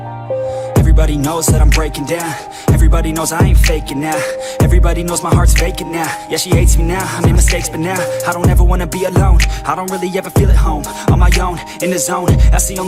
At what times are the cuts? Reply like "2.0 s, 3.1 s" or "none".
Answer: none